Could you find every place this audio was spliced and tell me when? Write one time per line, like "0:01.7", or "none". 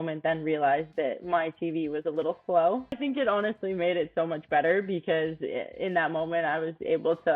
0:03.0

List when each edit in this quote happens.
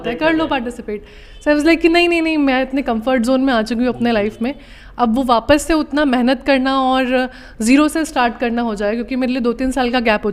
none

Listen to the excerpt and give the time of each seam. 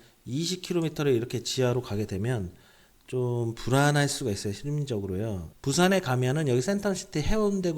0:05.5

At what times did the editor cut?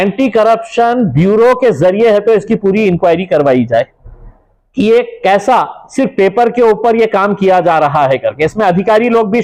none

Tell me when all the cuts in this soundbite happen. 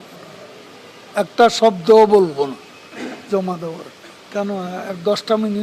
0:04.2

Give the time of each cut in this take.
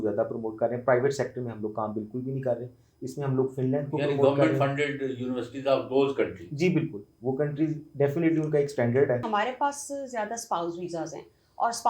0:09.3

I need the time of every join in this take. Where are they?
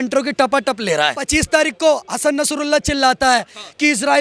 0:01.2

